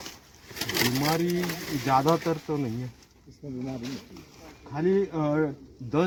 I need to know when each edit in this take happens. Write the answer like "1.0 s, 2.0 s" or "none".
none